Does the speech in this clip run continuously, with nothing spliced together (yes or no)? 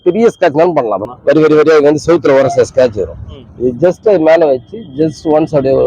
no